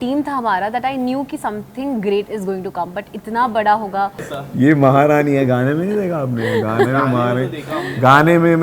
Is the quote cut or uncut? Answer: cut